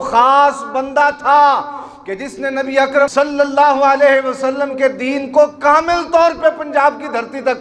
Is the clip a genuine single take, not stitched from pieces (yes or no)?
no